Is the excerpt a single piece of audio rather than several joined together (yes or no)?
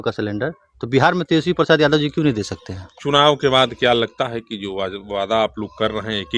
yes